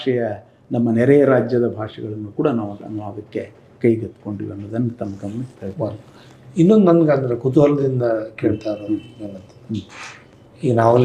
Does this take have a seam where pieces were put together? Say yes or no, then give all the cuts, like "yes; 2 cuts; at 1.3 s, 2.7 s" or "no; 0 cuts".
no; 0 cuts